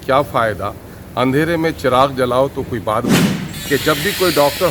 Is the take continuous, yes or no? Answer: no